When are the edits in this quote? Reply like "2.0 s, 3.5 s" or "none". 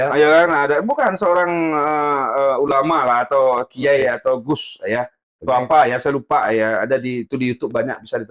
none